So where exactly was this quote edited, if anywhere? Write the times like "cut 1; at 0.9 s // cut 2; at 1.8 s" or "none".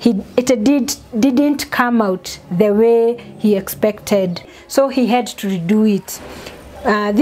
cut 1; at 4.6 s